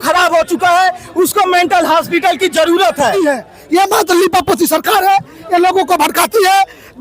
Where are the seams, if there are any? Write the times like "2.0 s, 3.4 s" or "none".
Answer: 3.1 s